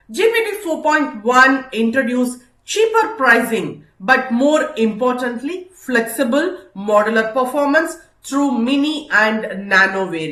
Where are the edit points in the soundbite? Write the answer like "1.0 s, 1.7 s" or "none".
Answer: none